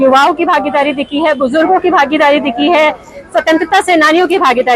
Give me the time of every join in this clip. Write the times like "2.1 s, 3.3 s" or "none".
none